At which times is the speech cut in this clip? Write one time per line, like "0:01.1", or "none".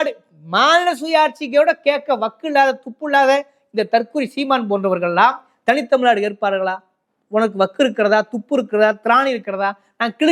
none